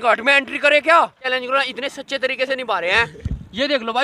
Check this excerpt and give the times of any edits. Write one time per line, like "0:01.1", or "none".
0:01.3

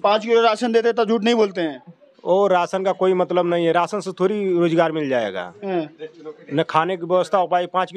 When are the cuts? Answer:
none

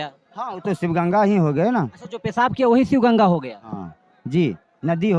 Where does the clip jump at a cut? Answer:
none

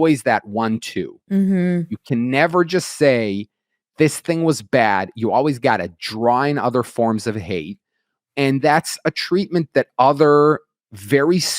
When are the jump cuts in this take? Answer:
none

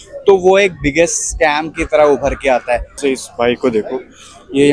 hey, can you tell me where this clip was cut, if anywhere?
0:02.9

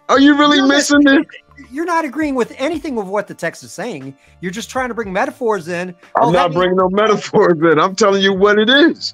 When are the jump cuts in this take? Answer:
none

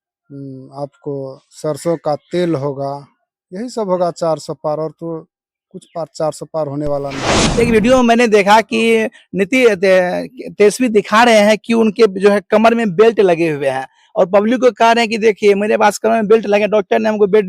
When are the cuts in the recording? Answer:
0:07.4

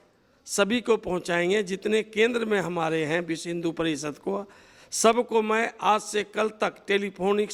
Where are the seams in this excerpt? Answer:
none

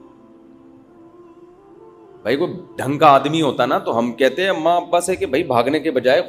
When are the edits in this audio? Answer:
0:02.2

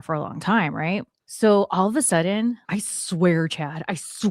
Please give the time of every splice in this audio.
0:01.2
0:02.6

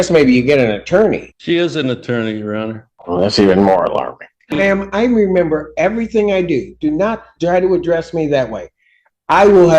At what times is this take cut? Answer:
0:01.3
0:02.9
0:04.6

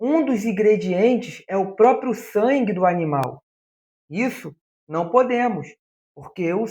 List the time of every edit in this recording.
none

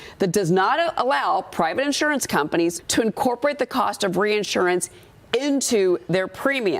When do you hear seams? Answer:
0:02.8

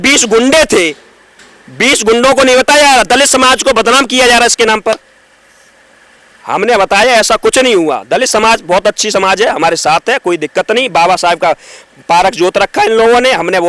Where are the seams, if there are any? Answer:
none

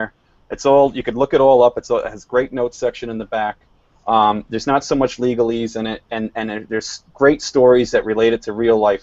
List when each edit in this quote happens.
0:04.2

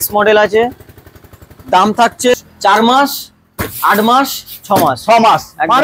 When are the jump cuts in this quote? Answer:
0:02.3

